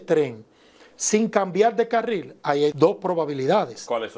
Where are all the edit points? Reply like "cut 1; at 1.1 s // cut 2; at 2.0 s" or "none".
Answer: cut 1; at 2.7 s